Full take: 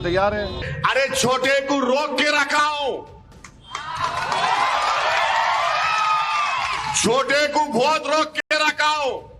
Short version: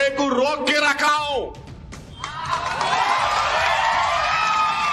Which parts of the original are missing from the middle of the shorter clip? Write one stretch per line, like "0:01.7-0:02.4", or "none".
none